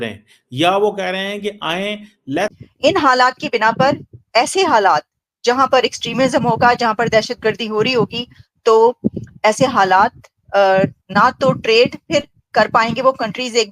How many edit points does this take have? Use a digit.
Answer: 1